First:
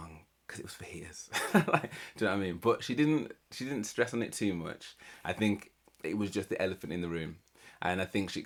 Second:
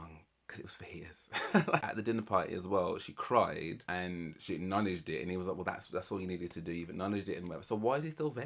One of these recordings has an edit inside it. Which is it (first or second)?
second